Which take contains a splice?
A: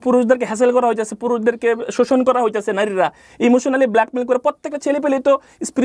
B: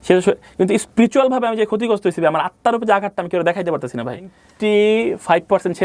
B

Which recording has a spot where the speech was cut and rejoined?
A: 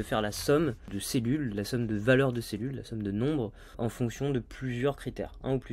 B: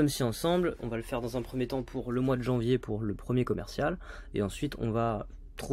A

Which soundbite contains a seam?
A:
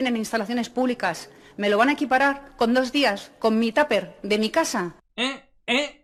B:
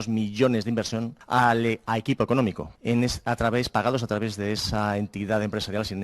B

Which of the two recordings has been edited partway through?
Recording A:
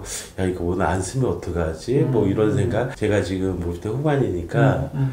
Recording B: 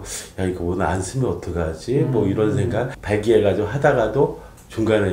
B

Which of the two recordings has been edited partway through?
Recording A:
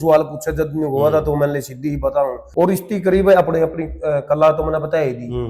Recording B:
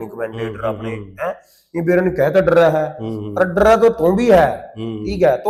A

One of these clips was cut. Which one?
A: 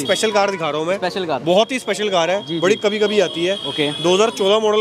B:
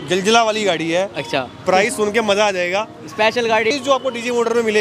B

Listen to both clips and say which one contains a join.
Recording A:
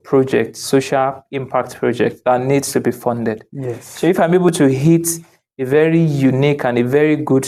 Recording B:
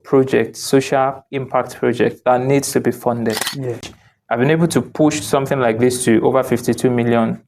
B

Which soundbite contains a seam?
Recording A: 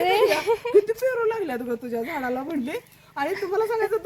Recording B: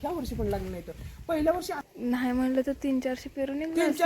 B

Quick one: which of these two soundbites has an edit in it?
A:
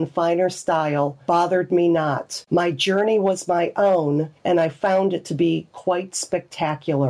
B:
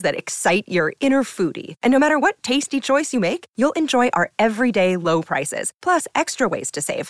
A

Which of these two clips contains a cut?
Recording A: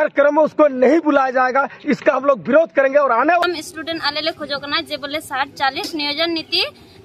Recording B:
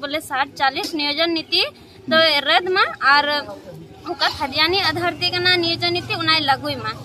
A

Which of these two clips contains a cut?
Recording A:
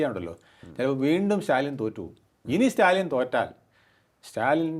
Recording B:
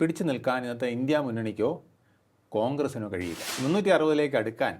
B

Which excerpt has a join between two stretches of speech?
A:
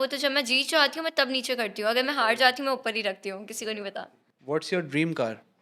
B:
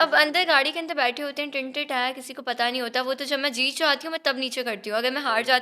A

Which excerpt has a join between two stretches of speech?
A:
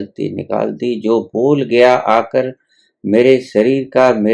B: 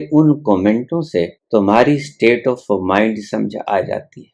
B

